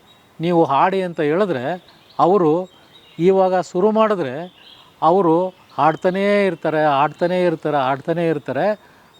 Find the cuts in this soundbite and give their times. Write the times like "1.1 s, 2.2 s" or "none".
none